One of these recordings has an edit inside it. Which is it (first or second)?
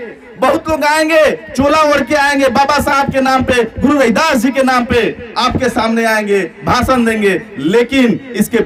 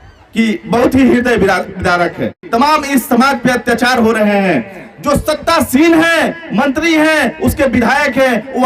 second